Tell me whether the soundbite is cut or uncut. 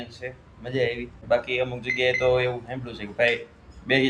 cut